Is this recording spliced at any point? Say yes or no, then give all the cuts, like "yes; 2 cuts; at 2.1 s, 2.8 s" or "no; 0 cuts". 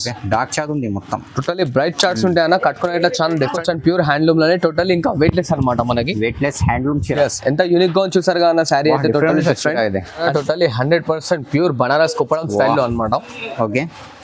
yes; 2 cuts; at 3.6 s, 10.2 s